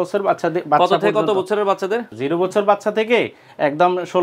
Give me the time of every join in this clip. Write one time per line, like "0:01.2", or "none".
0:02.1